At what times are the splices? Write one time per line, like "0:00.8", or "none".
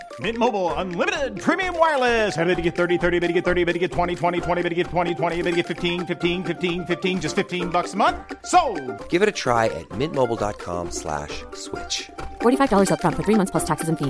none